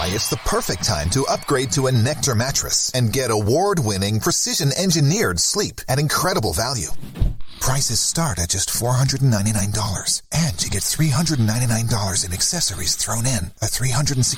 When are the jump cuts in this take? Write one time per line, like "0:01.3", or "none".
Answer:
none